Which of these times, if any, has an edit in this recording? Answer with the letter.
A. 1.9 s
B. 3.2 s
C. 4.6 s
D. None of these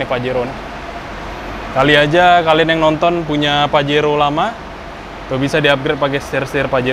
D